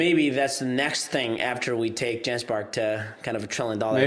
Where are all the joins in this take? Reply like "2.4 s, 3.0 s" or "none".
none